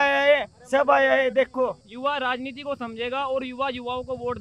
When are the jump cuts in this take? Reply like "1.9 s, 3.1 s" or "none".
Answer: 1.8 s